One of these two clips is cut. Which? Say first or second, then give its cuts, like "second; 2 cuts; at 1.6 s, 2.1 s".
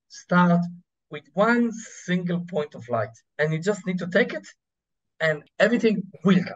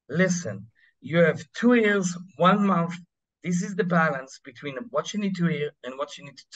first; 2 cuts; at 3.2 s, 5.4 s